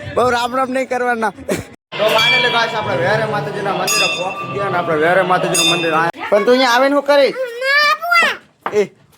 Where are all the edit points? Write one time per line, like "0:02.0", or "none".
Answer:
0:01.8
0:06.1